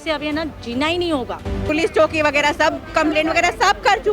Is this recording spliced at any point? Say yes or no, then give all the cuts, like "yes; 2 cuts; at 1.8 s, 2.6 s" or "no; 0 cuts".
yes; 1 cut; at 1.5 s